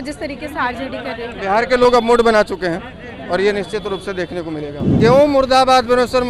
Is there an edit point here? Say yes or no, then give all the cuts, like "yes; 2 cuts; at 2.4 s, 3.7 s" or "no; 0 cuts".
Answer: yes; 1 cut; at 4.9 s